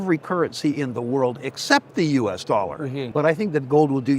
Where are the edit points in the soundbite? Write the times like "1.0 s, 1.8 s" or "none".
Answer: 3.0 s